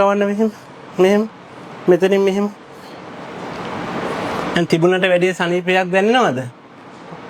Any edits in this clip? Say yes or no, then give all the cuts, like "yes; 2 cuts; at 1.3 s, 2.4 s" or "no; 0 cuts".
no; 0 cuts